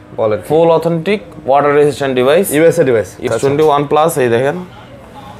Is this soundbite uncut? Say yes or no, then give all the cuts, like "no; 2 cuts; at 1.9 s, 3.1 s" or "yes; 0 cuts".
no; 1 cut; at 3.2 s